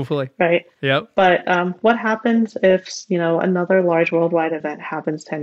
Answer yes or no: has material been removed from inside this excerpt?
no